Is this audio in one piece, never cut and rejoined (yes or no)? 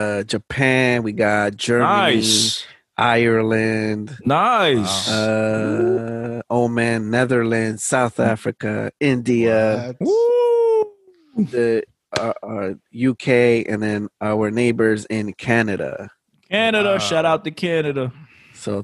yes